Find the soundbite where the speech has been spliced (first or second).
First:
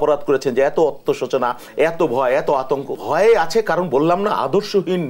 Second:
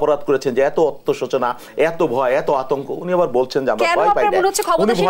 first